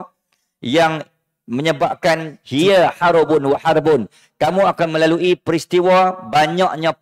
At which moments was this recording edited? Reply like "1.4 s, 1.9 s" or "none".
2.4 s